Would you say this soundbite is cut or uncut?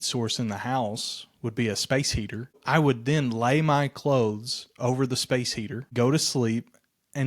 cut